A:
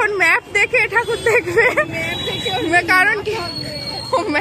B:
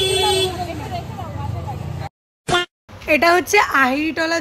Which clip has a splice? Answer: B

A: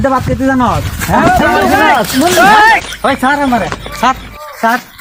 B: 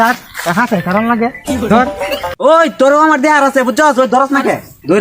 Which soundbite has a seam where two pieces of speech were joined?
B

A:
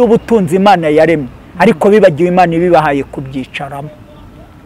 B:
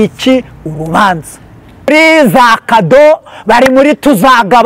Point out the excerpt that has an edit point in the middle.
B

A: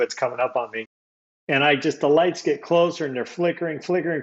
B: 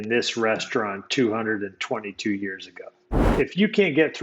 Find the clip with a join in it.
B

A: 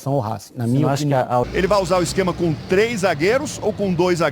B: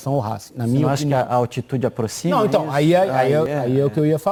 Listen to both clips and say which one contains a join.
A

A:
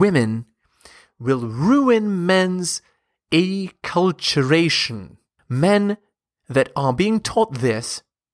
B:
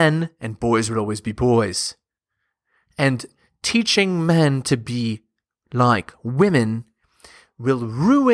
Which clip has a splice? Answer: A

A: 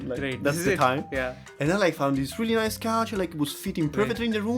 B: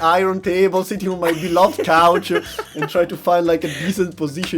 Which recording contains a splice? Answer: A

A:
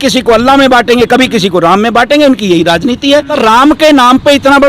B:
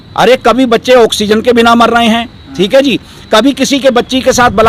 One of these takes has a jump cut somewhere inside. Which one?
A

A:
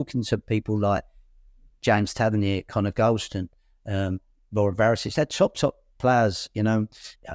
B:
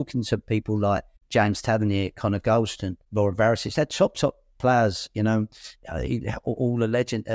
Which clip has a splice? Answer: B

